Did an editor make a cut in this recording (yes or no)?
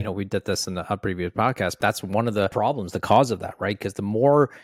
yes